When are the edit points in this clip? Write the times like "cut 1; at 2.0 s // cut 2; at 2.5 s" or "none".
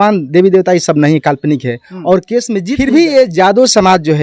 cut 1; at 2.7 s

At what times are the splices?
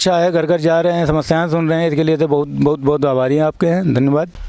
none

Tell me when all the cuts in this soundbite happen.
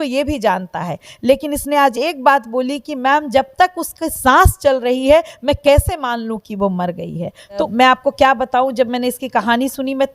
cut 1; at 7.7 s

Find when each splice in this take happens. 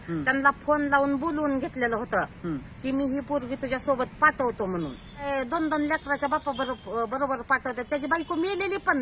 cut 1; at 5.3 s

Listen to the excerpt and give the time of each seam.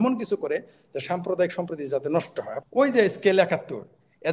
cut 1; at 2.6 s

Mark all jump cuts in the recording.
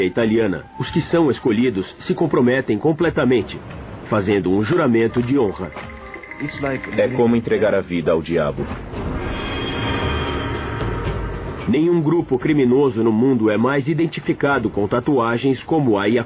cut 1; at 5.4 s

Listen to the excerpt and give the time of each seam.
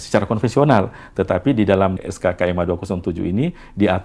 cut 1; at 2.0 s

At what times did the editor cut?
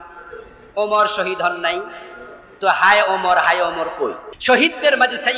cut 1; at 4.3 s

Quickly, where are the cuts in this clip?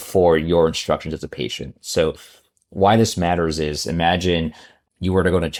none

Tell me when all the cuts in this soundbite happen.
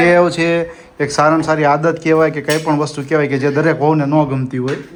none

